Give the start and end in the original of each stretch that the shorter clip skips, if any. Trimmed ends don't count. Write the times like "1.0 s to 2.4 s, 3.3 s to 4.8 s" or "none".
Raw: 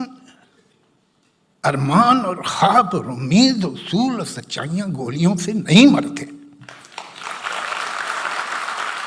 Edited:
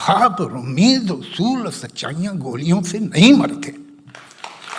none